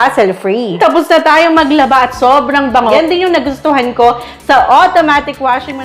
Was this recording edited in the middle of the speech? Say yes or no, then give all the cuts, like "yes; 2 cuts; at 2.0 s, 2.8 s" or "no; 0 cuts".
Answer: yes; 2 cuts; at 0.8 s, 3.0 s